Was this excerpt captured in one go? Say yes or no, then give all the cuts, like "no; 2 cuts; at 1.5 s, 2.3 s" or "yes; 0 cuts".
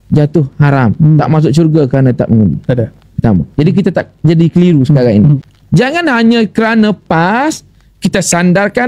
no; 1 cut; at 5.5 s